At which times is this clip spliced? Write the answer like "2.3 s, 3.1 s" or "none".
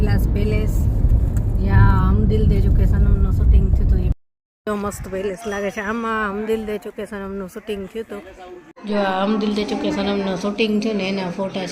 4.1 s, 8.7 s